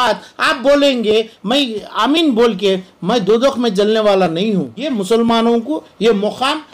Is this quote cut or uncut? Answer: cut